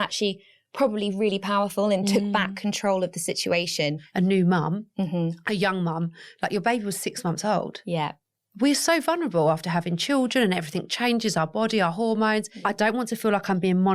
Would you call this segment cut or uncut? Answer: cut